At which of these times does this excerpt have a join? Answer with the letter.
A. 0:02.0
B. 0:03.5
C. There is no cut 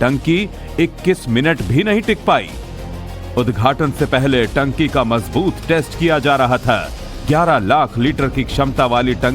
A